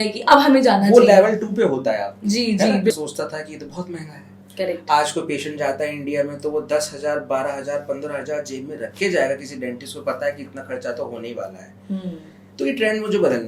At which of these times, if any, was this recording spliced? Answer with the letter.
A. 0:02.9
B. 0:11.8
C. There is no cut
A